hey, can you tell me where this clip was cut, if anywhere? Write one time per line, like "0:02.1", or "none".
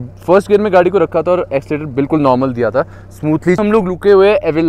0:03.6